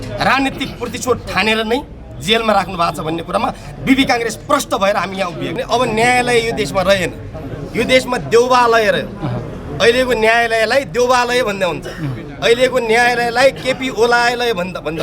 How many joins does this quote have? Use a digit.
1